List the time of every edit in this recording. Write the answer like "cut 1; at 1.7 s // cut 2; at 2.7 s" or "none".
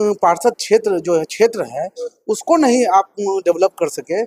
none